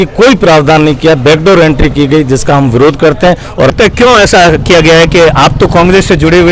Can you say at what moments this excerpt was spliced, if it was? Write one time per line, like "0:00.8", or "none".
0:03.7